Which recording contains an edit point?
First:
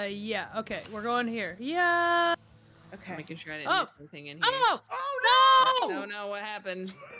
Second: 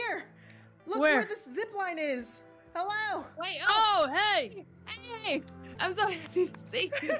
second; 1 cut; at 5.7 s

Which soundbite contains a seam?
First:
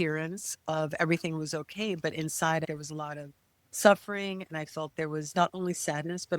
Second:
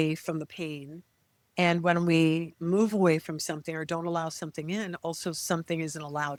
first; 1 cut; at 2.6 s

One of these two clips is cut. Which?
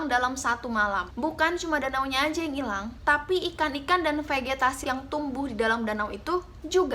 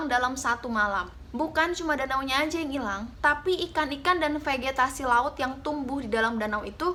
first; 2 cuts; at 1.1 s, 4.8 s

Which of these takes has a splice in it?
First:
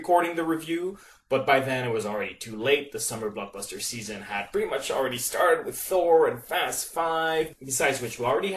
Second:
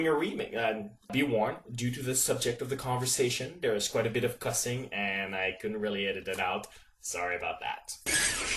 first; 1 cut; at 3.1 s

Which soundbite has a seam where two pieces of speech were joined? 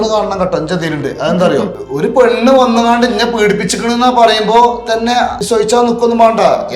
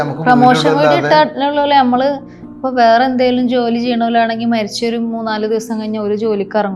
first; 2 cuts; at 1.8 s, 5.4 s

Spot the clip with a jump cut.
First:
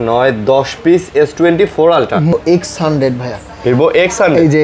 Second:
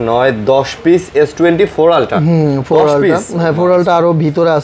first; 1 cut; at 2.3 s

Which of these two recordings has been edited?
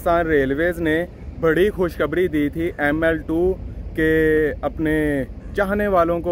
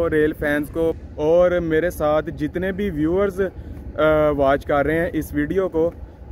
second; 1 cut; at 1.0 s

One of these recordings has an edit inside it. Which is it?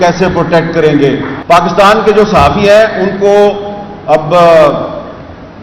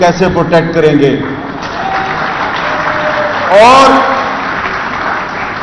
first; 1 cut; at 1.3 s

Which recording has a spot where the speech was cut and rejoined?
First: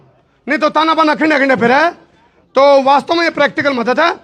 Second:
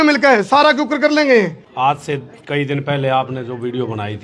second; 1 cut; at 1.6 s

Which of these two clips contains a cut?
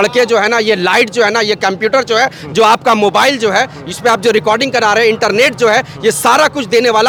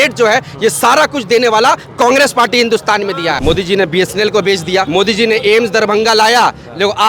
second; 2 cuts; at 3.4 s, 4.9 s

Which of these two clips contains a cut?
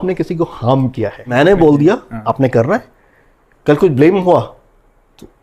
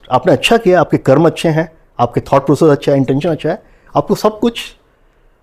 first; 1 cut; at 1.3 s

